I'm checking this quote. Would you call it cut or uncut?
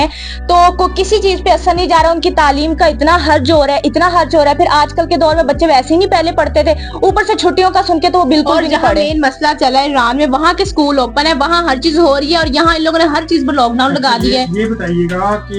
uncut